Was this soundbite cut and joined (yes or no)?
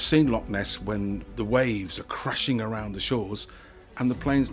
yes